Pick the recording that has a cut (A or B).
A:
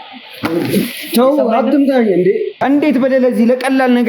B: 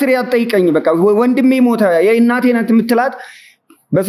A